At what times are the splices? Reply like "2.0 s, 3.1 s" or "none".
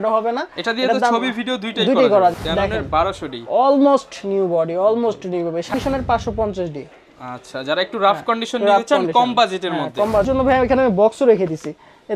2.3 s, 5.7 s, 10.2 s